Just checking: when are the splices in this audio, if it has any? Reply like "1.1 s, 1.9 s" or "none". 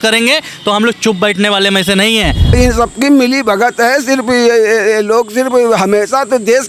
2.5 s